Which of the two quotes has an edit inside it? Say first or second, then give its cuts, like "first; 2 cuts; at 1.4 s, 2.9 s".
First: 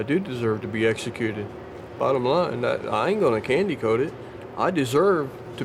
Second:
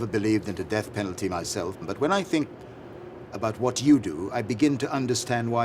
second; 1 cut; at 1.8 s